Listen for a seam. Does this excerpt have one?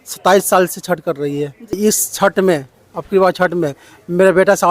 yes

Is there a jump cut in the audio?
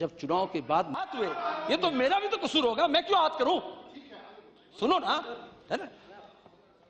yes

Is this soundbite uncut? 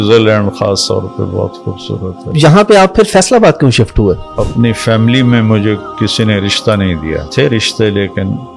no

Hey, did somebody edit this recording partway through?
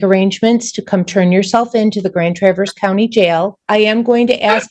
yes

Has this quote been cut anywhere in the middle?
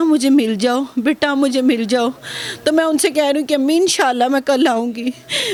no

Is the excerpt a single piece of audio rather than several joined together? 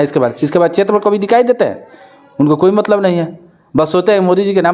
yes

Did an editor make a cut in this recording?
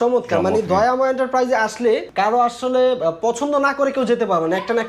yes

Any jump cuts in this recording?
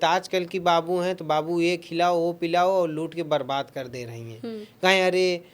no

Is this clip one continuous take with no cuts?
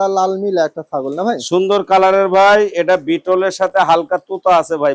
yes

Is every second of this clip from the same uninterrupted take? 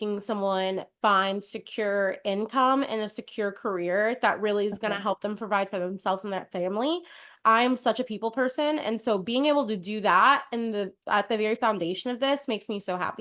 yes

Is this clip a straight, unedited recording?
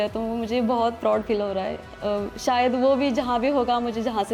yes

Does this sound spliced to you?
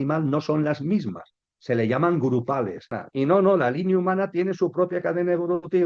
yes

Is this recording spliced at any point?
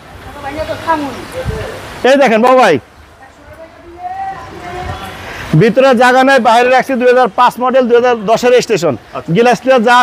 no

